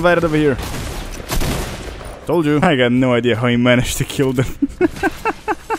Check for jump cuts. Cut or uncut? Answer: cut